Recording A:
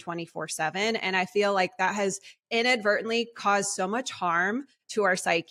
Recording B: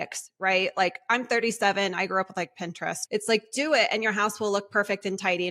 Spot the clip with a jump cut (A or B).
B